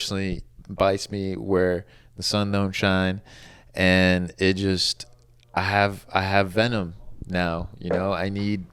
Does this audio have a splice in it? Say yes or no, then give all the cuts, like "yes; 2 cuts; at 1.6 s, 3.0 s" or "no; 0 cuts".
no; 0 cuts